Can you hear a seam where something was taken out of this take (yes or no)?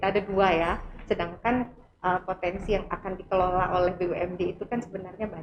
no